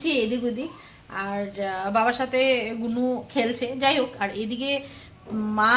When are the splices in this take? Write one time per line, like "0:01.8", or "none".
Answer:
none